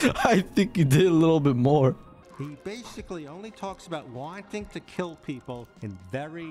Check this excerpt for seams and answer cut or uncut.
cut